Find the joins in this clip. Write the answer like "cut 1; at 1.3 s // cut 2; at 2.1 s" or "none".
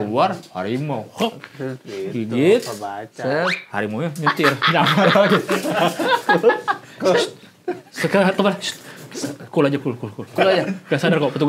none